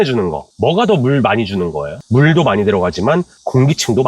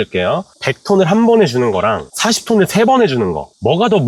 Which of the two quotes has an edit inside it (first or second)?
first